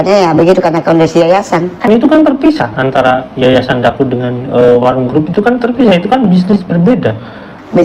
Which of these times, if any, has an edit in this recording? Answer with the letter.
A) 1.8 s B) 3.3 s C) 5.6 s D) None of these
A